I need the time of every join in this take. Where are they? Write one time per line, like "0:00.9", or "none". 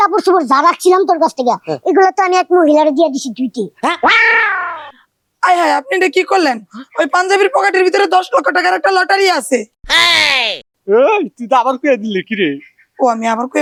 none